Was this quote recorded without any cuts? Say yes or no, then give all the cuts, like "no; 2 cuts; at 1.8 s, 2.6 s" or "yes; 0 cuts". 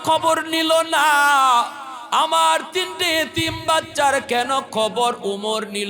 yes; 0 cuts